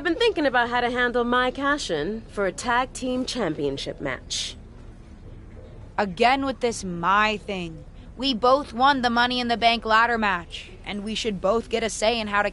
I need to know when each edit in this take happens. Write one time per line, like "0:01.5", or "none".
0:04.2
0:05.9